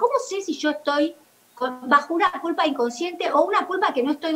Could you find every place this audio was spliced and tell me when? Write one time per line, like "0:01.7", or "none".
none